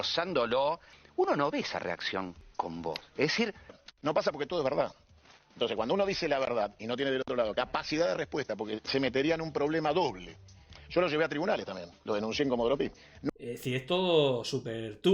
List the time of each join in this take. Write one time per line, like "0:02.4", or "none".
0:00.9
0:02.4
0:03.9
0:13.2

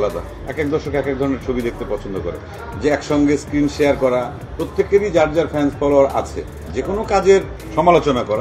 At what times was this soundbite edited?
0:02.6
0:06.7

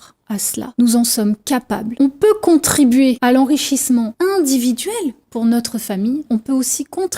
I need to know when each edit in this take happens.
0:01.9

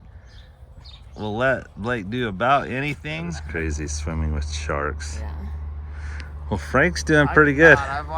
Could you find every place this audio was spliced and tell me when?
0:03.4

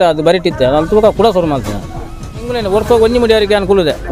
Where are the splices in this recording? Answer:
0:02.3

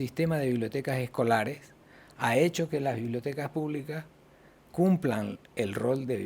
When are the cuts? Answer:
none

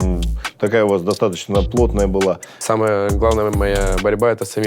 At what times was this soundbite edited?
0:02.5

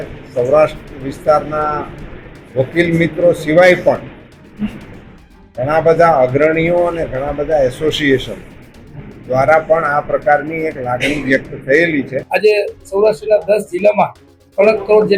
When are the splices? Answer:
0:12.2

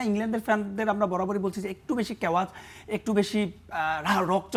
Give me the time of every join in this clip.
none

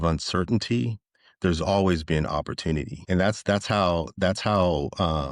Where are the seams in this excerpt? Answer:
0:02.9

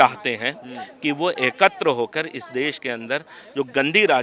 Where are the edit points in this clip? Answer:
none

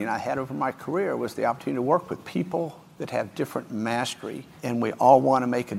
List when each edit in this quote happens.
0:02.2
0:04.5

